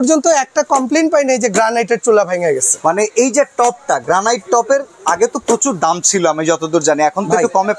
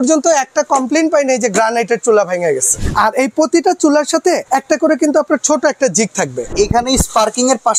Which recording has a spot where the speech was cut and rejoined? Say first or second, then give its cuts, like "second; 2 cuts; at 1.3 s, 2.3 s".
second; 3 cuts; at 2.7 s, 4.4 s, 6.5 s